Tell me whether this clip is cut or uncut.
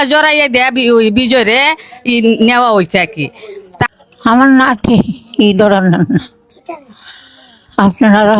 cut